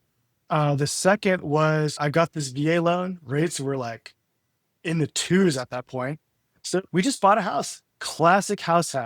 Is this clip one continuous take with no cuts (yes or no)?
no